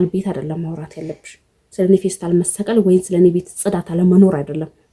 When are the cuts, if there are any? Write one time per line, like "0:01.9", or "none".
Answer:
none